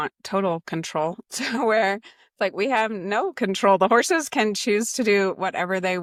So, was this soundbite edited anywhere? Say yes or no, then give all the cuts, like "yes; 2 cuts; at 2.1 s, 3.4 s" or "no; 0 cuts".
no; 0 cuts